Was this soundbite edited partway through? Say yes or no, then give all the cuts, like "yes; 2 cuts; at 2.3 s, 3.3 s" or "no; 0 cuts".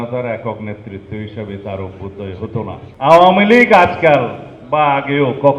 yes; 1 cut; at 2.8 s